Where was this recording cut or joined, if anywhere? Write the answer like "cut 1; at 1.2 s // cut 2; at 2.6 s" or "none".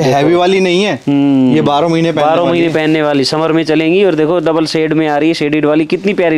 none